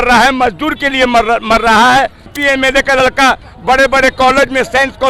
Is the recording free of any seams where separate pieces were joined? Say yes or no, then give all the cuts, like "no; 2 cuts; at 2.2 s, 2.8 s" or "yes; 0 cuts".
no; 1 cut; at 2.3 s